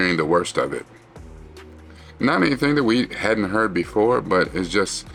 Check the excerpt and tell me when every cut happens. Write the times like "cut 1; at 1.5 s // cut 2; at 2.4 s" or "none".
none